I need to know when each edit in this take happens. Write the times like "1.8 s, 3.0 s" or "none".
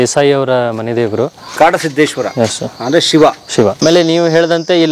3.8 s